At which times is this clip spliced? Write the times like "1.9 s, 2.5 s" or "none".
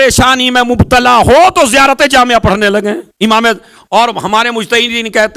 3.1 s